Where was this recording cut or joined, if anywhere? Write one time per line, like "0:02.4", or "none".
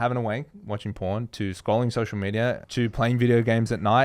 0:02.6